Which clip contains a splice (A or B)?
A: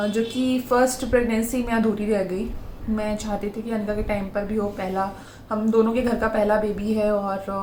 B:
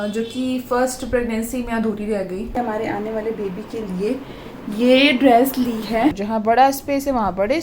B